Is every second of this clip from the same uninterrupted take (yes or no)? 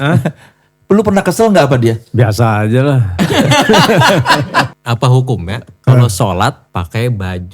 no